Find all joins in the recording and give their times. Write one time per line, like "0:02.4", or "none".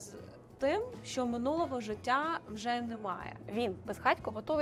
0:03.5